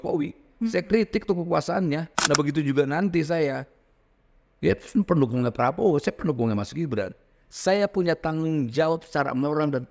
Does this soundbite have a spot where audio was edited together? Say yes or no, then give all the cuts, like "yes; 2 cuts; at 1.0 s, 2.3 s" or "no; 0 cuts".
yes; 1 cut; at 2.1 s